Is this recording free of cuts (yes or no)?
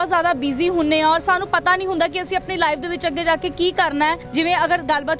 no